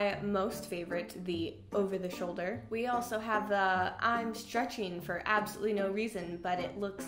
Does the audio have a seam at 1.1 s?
no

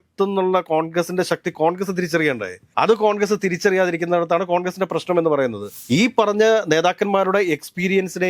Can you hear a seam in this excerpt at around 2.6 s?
no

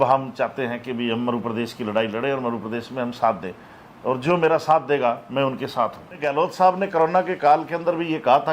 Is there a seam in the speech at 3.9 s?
no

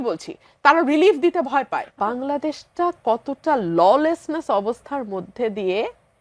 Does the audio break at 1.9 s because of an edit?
yes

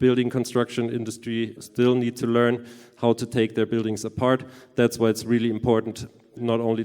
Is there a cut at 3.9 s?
no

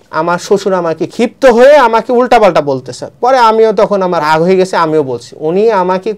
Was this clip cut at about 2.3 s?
no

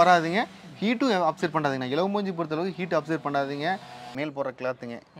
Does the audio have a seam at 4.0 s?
yes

